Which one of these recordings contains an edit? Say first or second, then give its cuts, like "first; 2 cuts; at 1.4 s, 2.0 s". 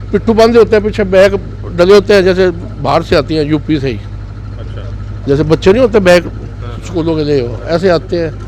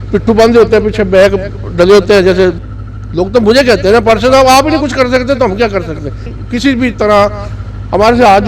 second; 2 cuts; at 2.7 s, 6.2 s